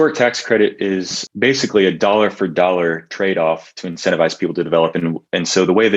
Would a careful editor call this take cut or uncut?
cut